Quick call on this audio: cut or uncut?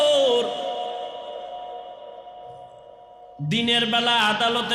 uncut